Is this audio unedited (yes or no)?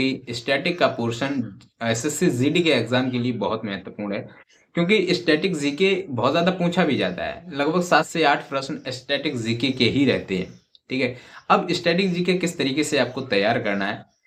yes